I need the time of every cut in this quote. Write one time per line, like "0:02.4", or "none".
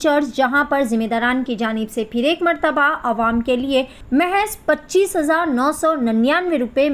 0:04.0